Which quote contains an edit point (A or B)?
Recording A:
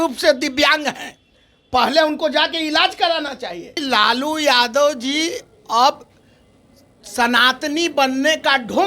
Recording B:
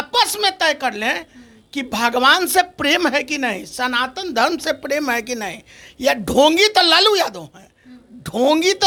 A